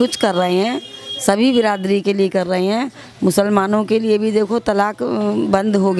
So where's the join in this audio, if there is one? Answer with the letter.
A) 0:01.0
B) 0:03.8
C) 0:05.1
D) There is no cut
D